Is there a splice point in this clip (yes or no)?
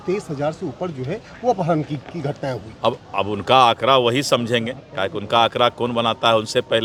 no